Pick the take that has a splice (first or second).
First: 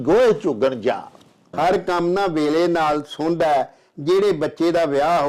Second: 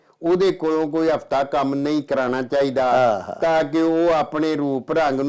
first